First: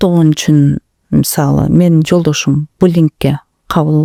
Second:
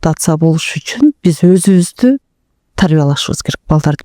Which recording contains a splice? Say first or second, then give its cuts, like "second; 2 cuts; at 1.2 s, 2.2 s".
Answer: second; 1 cut; at 1.2 s